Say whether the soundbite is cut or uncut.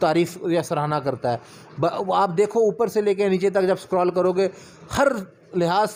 uncut